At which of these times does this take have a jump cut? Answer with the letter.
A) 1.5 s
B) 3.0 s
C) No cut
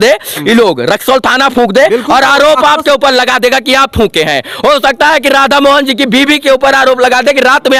C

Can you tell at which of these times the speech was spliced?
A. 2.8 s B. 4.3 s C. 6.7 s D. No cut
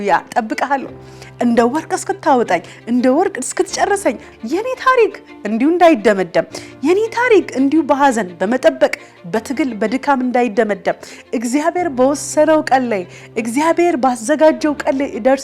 B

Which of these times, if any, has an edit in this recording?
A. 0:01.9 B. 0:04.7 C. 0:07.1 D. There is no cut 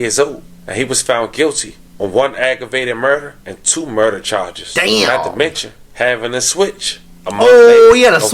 D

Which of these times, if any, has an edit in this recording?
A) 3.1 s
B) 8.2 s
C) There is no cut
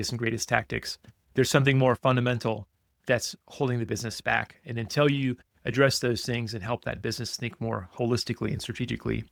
C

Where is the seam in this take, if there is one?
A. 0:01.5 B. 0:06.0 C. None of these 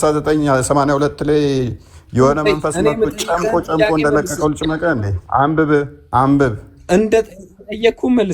B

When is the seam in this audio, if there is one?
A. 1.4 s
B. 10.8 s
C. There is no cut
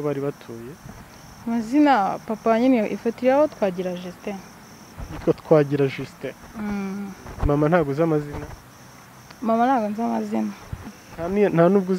B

